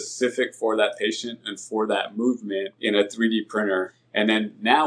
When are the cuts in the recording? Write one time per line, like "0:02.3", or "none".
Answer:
0:02.7
0:03.9